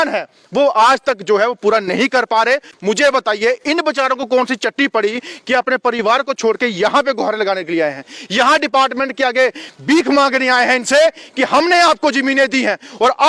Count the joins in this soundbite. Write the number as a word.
one